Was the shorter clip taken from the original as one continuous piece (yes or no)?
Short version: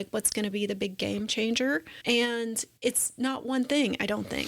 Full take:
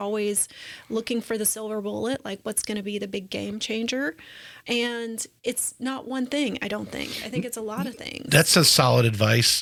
no